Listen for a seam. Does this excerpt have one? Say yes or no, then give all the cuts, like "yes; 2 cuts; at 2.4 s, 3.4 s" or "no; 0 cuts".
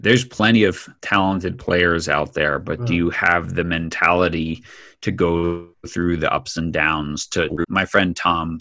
yes; 1 cut; at 0.9 s